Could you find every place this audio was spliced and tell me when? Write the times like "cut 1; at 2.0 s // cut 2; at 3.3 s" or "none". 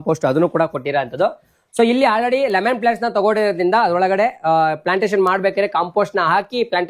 none